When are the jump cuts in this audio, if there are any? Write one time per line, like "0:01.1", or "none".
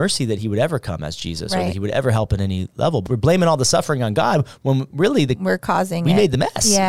0:03.1